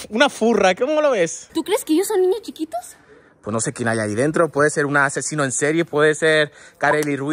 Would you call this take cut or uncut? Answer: cut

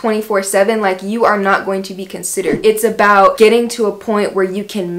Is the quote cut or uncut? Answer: cut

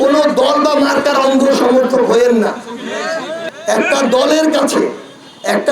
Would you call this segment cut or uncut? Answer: cut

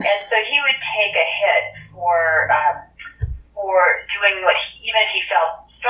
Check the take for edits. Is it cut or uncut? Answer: uncut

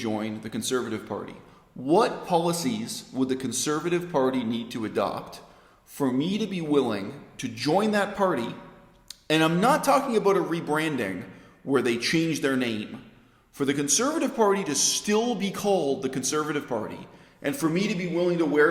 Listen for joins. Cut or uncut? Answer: uncut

